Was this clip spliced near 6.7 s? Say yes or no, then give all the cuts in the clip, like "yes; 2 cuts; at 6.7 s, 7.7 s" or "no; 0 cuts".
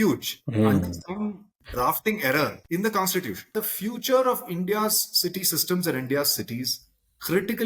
no; 2 cuts; at 2.6 s, 3.5 s